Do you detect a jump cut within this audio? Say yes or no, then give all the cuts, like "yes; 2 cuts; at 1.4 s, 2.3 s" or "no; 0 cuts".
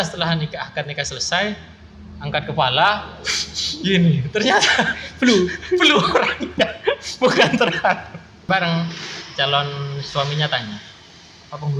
yes; 1 cut; at 8.4 s